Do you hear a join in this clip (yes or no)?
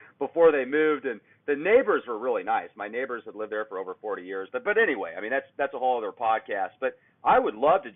no